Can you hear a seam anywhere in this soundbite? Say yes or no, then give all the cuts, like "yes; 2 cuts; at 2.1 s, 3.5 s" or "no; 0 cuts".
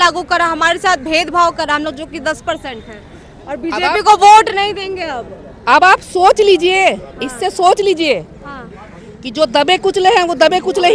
no; 0 cuts